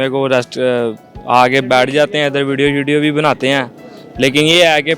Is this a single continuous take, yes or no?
yes